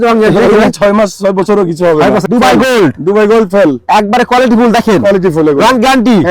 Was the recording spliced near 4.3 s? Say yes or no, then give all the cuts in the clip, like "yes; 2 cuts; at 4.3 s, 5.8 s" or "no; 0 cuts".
no; 1 cut; at 2.2 s